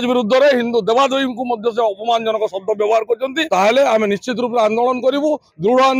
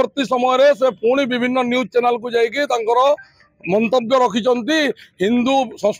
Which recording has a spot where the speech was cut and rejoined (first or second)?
first